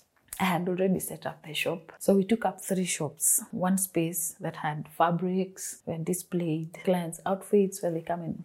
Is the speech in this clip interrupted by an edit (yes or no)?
yes